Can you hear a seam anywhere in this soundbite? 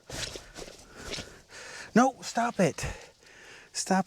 no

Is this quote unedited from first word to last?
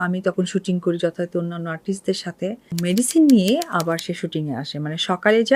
no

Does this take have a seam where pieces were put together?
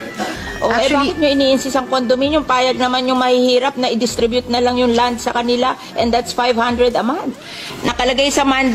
no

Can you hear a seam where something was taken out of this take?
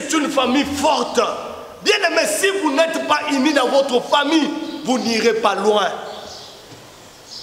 no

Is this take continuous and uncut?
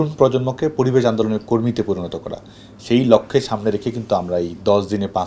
yes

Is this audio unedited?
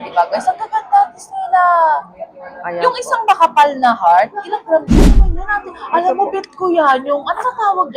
no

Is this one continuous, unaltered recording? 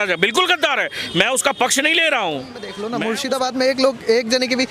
no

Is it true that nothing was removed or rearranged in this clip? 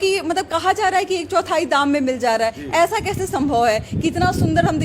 yes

